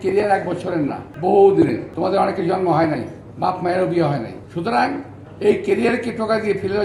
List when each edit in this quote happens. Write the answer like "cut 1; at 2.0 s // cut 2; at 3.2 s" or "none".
cut 1; at 1.1 s // cut 2; at 1.9 s // cut 3; at 4.4 s